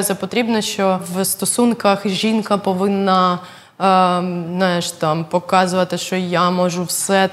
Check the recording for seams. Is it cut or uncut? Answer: cut